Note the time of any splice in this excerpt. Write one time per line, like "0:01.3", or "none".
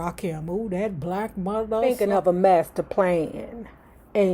0:01.9

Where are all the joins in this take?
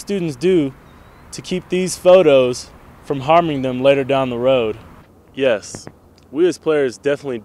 0:05.1

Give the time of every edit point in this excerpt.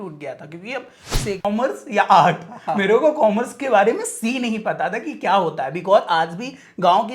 0:01.5

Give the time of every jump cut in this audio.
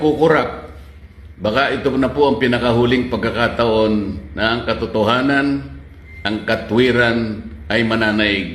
none

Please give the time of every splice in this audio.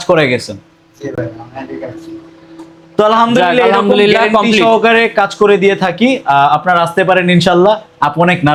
none

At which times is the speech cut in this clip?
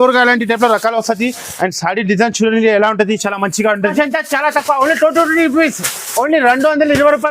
0:03.9

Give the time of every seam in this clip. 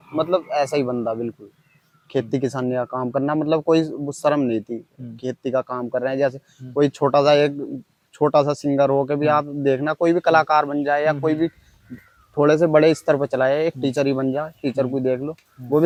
none

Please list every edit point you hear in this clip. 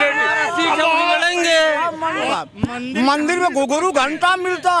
0:02.3

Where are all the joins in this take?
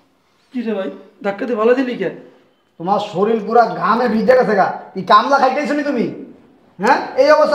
none

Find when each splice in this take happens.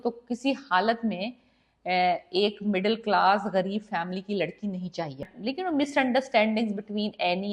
0:05.3

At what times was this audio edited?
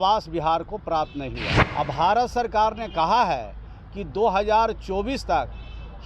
0:01.6

